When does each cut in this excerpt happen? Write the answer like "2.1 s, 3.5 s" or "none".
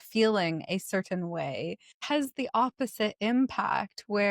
1.9 s

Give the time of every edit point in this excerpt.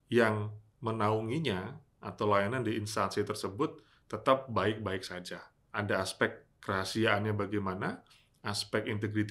5.5 s

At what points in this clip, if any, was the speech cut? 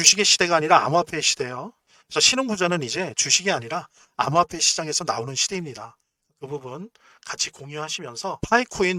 none

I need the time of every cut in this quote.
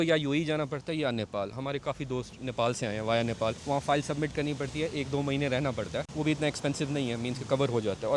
3.6 s, 6.1 s

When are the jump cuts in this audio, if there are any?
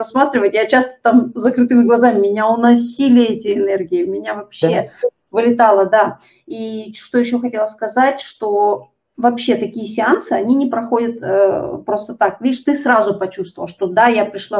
none

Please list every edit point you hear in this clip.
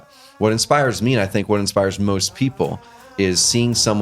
3.0 s

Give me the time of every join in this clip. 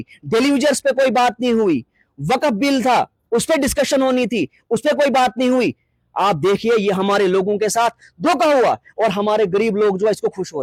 none

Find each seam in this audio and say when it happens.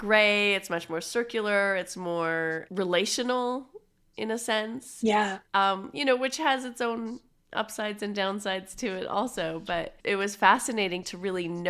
2.6 s, 9.9 s

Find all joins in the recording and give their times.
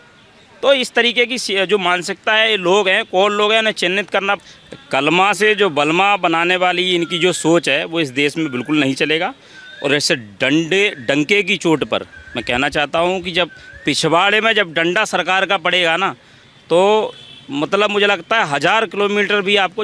4.4 s

